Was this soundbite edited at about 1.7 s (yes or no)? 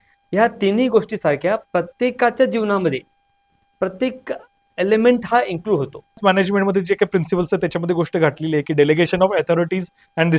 no